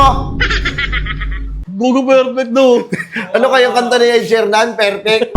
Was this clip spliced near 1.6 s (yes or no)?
yes